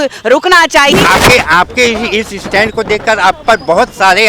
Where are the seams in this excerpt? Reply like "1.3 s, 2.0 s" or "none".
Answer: 0.9 s